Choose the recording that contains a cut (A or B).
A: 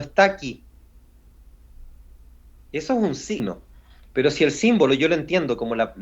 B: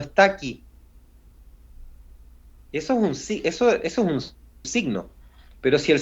A